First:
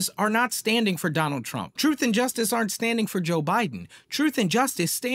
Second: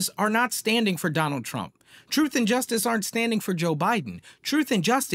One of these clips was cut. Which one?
first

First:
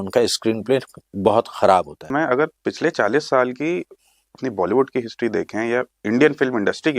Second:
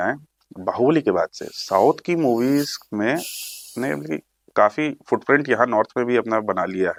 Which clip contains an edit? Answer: first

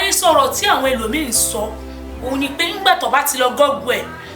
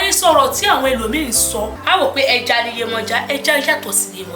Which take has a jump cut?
second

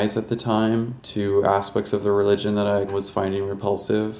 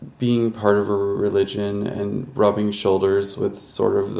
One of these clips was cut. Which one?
first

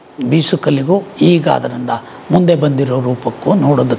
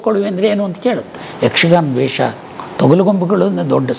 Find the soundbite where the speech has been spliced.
second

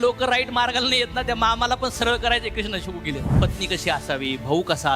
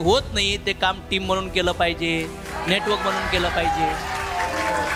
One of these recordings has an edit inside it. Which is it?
first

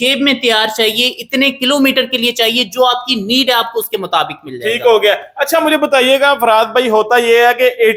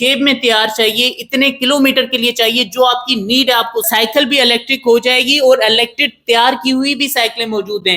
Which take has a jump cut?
second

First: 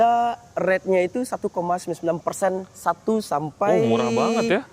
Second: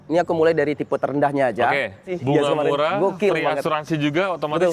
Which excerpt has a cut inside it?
second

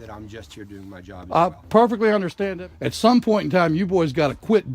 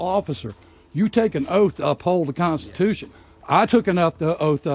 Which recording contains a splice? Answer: first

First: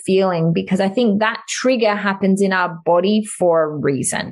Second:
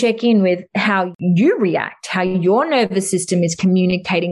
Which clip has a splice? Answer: second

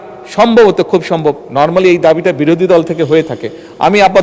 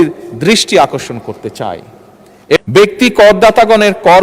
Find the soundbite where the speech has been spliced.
second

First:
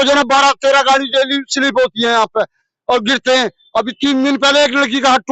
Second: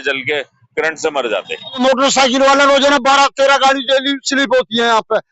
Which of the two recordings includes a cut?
second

